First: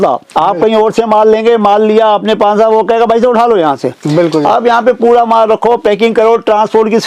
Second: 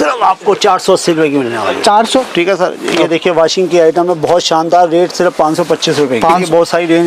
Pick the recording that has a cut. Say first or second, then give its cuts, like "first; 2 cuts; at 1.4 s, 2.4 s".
second; 2 cuts; at 2.3 s, 6.3 s